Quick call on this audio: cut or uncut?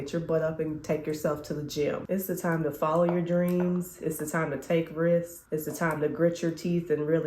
cut